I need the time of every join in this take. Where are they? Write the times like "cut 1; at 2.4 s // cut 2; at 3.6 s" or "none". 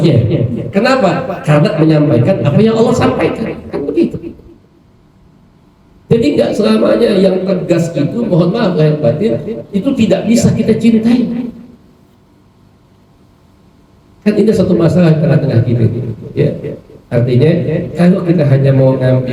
none